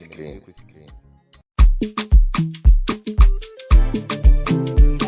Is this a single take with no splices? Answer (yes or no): yes